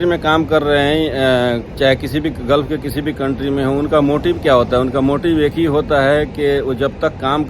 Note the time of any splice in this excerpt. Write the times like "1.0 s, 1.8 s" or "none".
none